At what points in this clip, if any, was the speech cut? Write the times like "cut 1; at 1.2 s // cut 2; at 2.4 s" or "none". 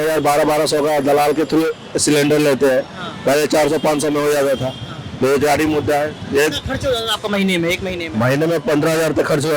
none